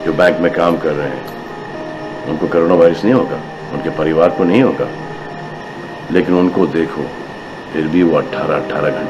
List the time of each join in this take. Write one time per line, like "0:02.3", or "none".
none